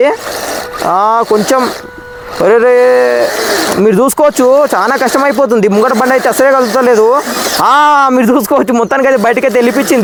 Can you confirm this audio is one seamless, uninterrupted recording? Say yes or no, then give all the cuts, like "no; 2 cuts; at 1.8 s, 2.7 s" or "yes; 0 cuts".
yes; 0 cuts